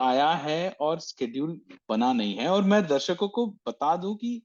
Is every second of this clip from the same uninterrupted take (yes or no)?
yes